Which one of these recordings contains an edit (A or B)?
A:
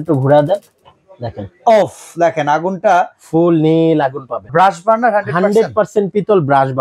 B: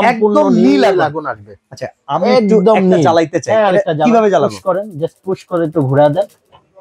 A